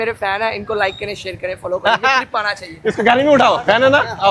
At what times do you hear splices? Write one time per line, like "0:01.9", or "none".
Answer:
0:02.3